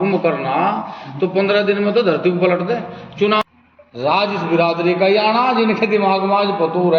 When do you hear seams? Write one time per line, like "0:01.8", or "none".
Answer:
0:03.4